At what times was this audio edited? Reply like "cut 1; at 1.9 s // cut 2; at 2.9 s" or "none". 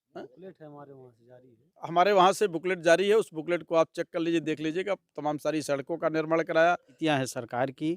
cut 1; at 7.0 s